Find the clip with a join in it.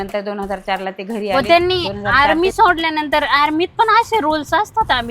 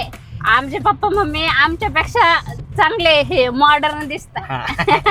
first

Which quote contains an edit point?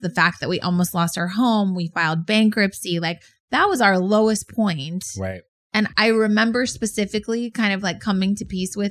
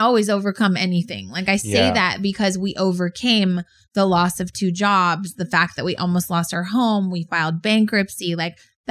first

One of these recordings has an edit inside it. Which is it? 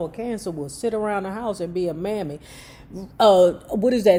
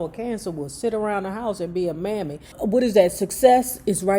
second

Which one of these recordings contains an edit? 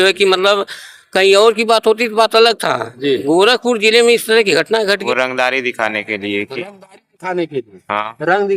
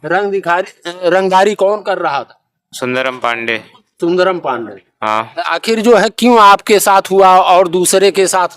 first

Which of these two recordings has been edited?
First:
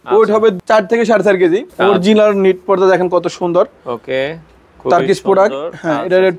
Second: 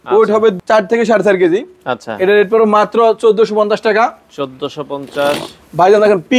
first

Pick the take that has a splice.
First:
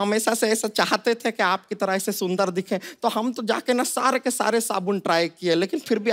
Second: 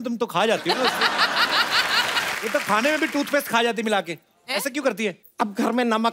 second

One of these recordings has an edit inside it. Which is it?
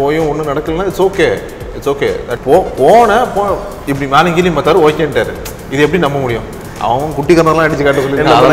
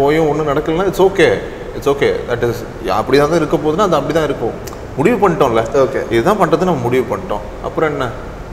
first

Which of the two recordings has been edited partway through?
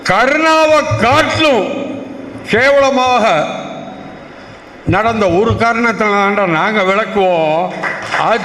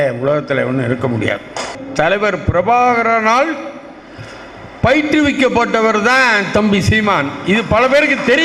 second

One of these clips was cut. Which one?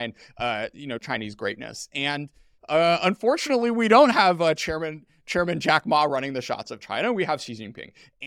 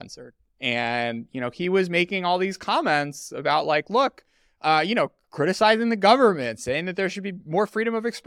first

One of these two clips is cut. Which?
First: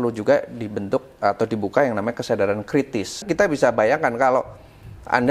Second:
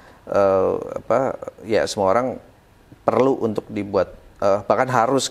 first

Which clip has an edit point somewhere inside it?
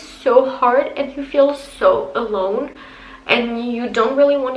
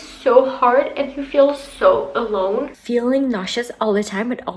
second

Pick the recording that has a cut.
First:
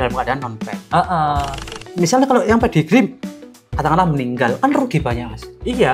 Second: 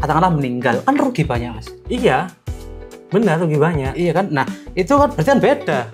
first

